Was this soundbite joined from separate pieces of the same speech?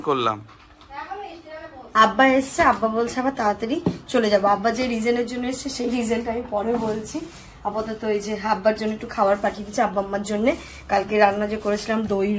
no; 0 cuts

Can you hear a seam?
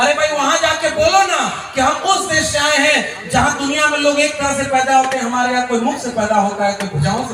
no; 0 cuts

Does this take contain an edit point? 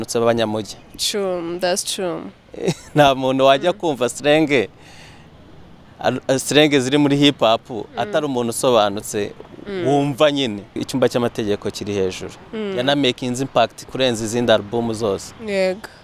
yes; 1 cut; at 10.8 s

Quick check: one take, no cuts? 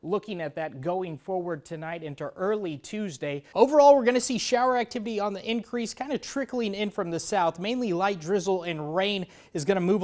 no; 1 cut; at 3.4 s

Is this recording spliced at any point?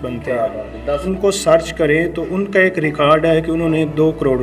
yes; 1 cut; at 1.1 s

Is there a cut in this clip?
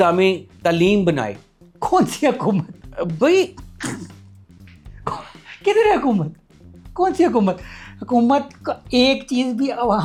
no; 0 cuts

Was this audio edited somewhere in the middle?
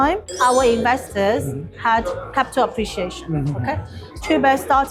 no; 0 cuts

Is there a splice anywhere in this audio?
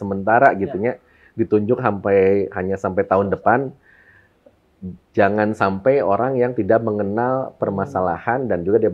no; 0 cuts

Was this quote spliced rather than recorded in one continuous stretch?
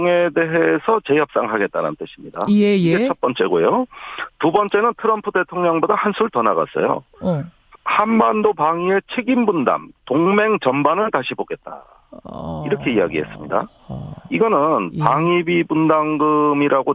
yes; 1 cut; at 9.5 s

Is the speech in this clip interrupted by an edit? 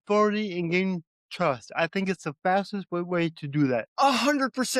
yes; 1 cut; at 3.9 s

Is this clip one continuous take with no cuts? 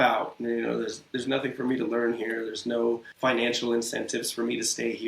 no; 1 cut; at 3.1 s

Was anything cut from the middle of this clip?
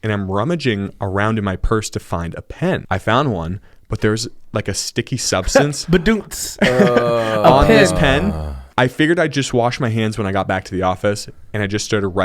yes; 1 cut; at 2.8 s

